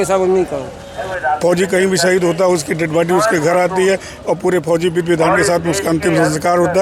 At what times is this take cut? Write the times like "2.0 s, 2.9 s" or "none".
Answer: 1.1 s